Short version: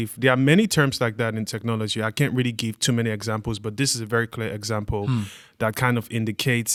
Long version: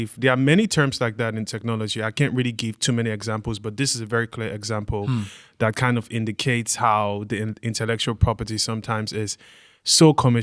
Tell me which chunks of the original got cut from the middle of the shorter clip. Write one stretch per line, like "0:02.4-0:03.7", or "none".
none